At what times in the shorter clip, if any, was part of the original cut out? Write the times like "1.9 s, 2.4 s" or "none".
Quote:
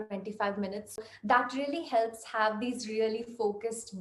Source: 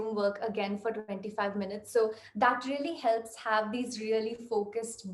1.0 s